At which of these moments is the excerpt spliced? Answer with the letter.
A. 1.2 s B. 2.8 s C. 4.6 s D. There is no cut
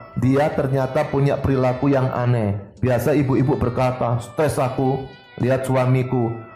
D